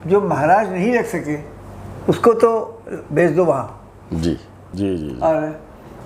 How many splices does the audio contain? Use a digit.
1